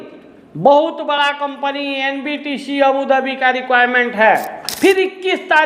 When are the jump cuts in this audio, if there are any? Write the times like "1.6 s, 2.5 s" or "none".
4.6 s